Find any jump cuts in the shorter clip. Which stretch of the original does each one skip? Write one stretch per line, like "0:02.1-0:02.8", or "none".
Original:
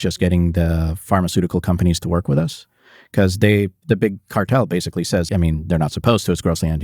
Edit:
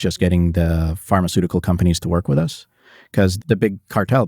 0:03.3-0:03.7